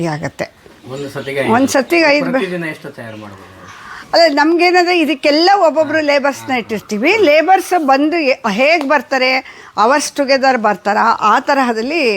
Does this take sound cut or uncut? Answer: uncut